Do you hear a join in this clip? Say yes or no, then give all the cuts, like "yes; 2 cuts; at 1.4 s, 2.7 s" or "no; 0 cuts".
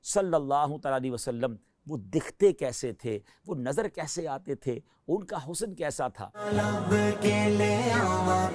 yes; 1 cut; at 6.5 s